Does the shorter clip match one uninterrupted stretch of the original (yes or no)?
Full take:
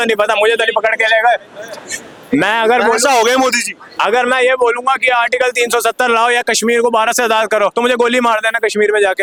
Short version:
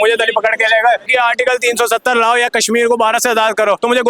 no